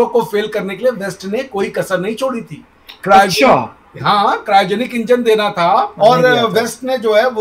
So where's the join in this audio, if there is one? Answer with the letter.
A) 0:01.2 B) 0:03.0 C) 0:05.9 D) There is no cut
C